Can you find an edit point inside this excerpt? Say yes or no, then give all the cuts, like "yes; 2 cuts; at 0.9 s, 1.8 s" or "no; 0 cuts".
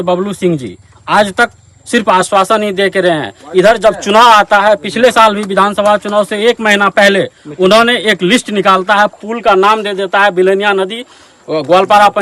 no; 0 cuts